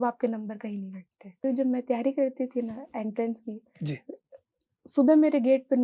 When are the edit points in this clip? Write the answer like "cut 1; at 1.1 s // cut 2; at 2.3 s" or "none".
cut 1; at 1.4 s